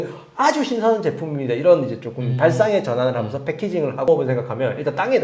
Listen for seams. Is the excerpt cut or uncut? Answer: cut